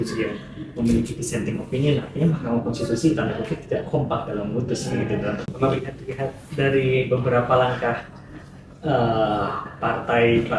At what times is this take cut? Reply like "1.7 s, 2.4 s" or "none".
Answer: 5.5 s